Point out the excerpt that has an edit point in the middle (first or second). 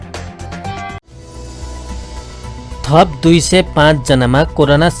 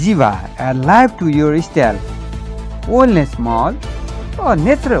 first